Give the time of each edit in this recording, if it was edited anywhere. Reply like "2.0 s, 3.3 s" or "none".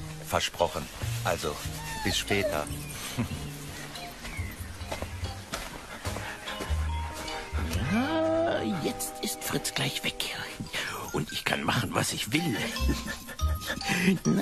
7.6 s